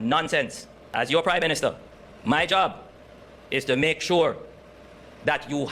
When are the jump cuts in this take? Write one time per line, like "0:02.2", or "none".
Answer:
0:00.9